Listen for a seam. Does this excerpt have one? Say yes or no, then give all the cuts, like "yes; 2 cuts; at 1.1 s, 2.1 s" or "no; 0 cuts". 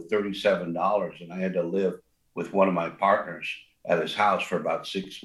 no; 0 cuts